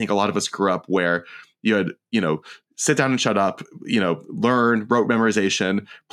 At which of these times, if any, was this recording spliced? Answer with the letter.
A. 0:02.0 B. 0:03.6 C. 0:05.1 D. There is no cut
D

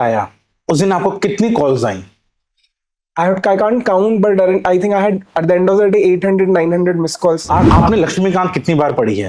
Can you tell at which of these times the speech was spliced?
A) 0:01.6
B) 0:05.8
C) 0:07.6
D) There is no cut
C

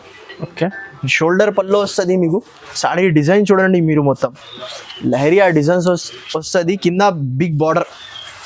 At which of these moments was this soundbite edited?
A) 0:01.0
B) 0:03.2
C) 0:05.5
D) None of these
A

